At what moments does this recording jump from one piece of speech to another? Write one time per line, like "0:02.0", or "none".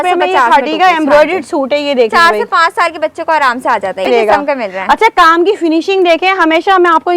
0:04.1